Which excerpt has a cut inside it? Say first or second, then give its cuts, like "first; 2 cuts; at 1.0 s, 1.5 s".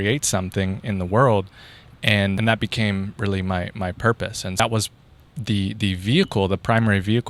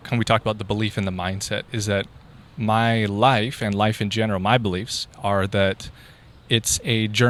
first; 2 cuts; at 2.4 s, 4.6 s